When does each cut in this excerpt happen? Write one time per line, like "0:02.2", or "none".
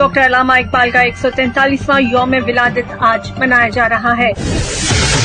0:04.3